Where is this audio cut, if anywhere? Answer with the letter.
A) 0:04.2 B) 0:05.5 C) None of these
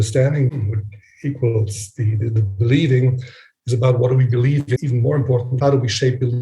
B